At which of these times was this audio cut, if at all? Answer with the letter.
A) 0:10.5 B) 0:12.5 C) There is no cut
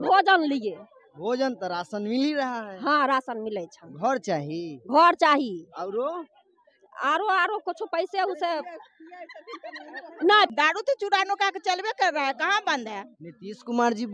A